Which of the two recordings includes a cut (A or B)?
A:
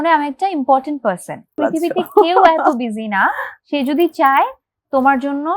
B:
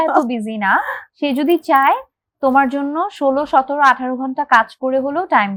A